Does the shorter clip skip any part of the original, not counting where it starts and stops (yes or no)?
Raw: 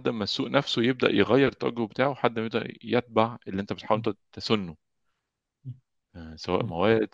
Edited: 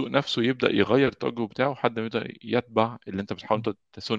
no